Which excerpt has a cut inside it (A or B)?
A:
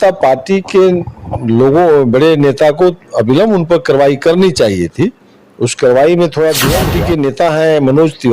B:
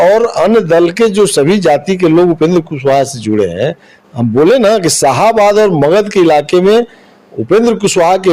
A